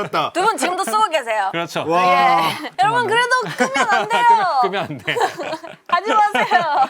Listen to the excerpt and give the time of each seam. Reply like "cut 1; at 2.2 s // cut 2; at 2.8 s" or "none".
cut 1; at 2.6 s